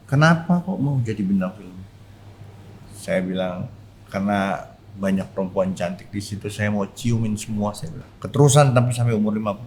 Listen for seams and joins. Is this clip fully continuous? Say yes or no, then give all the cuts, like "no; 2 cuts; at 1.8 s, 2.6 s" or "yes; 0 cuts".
no; 1 cut; at 7.9 s